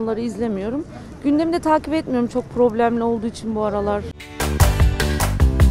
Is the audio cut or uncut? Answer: cut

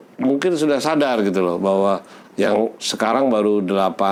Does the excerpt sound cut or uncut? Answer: uncut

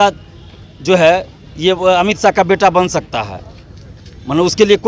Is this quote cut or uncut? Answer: uncut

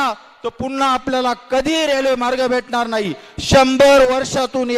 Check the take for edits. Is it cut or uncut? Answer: uncut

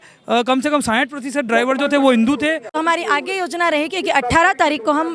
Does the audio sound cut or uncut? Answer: cut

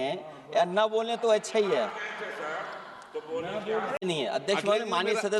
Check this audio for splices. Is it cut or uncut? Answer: cut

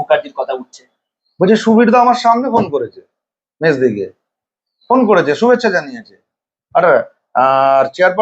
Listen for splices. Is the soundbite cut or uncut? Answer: uncut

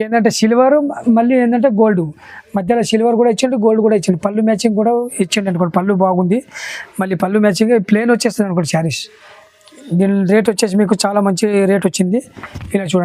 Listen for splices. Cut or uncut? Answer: uncut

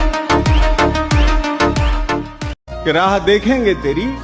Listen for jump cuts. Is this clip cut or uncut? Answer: cut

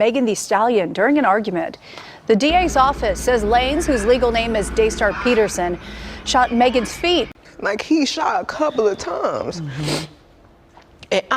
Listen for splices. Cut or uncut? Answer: cut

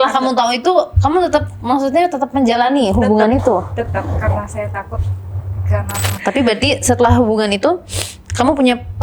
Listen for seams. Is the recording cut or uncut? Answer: cut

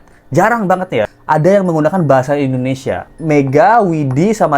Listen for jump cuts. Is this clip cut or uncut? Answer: cut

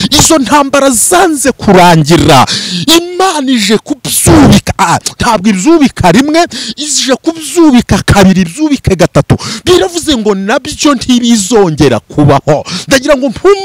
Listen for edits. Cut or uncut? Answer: uncut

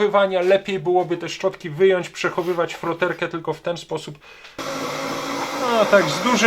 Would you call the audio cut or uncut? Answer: cut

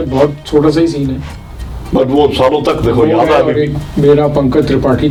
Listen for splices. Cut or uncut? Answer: uncut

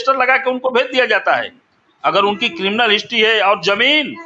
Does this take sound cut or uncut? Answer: uncut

